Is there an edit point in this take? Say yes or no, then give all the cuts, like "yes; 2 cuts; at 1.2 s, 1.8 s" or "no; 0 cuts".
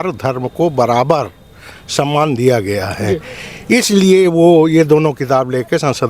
no; 0 cuts